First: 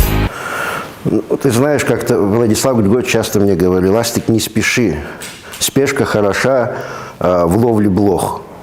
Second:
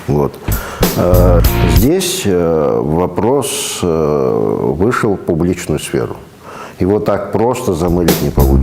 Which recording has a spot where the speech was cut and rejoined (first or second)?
second